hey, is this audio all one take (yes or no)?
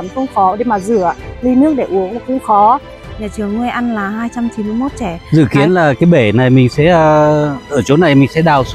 no